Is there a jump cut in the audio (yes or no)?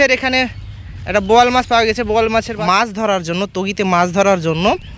yes